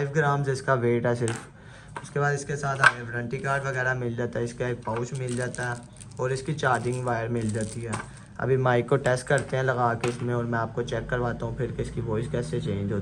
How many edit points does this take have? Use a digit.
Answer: 0